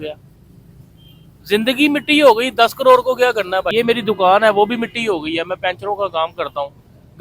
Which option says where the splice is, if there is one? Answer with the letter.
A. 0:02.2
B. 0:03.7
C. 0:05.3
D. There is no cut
B